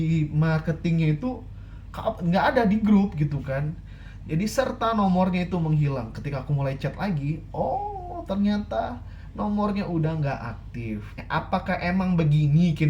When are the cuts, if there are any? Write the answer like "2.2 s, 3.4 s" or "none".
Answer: 11.2 s